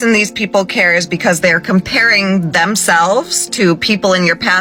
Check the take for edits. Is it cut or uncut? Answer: uncut